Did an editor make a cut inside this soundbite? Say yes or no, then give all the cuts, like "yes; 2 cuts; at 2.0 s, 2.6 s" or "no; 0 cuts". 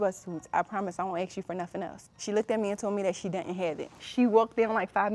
yes; 2 cuts; at 2.1 s, 4.0 s